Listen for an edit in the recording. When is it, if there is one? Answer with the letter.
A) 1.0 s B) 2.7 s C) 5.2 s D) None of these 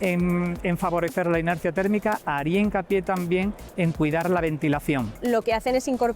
C